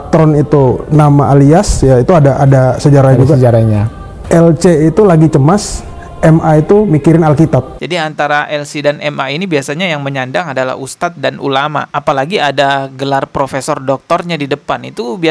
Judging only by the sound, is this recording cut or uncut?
cut